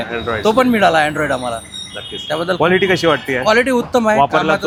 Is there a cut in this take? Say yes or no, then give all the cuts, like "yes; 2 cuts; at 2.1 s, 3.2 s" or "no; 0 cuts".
no; 0 cuts